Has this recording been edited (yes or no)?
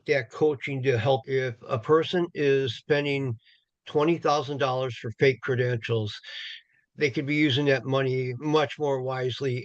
yes